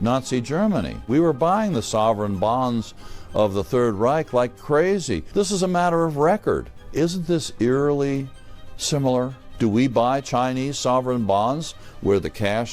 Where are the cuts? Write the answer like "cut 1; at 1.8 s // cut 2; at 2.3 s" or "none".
cut 1; at 1.0 s // cut 2; at 5.2 s // cut 3; at 6.8 s // cut 4; at 9.4 s